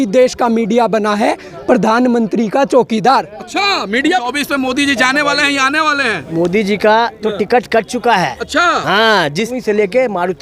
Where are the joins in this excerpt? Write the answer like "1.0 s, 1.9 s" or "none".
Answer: 4.3 s, 9.5 s